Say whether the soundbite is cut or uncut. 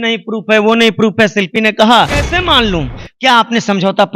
cut